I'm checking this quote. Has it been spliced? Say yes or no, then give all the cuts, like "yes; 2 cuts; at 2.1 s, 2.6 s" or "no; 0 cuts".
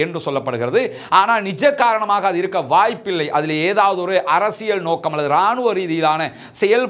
no; 0 cuts